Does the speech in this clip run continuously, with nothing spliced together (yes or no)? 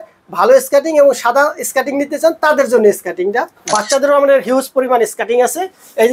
no